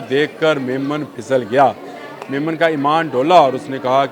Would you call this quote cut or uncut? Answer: uncut